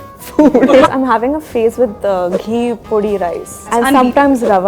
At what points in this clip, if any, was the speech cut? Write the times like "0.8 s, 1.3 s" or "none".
0.9 s, 3.7 s